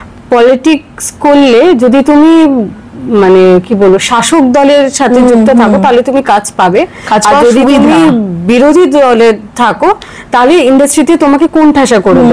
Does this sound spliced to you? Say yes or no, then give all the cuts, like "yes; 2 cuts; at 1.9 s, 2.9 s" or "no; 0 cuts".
no; 0 cuts